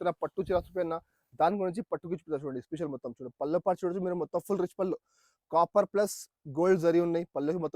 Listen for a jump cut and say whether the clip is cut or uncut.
uncut